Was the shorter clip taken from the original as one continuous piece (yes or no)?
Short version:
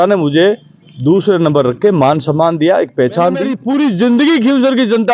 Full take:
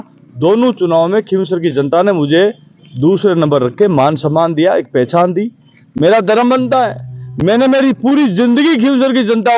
no